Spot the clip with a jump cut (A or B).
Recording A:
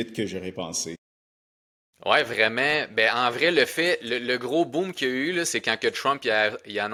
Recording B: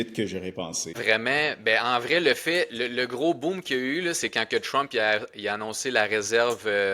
B